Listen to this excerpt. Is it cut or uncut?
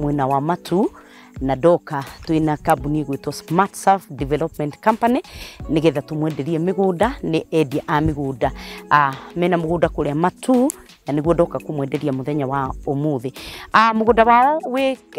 uncut